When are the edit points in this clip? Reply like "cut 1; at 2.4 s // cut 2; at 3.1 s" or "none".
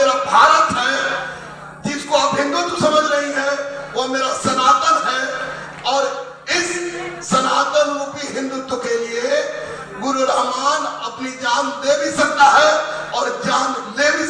none